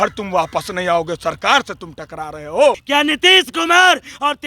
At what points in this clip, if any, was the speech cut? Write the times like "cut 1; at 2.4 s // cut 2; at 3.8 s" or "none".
cut 1; at 2.8 s